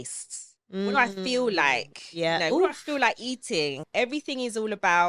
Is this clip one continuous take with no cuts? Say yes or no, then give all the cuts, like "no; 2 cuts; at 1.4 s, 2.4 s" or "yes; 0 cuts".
no; 1 cut; at 3.8 s